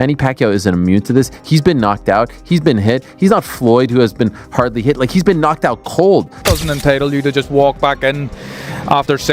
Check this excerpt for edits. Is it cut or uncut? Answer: cut